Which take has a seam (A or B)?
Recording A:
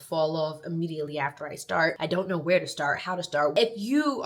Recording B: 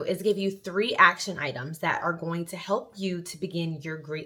A